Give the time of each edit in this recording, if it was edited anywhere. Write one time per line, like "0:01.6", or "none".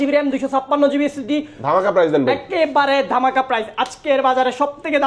none